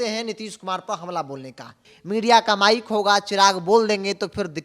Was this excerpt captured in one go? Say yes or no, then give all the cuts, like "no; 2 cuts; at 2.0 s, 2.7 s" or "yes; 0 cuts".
no; 1 cut; at 1.9 s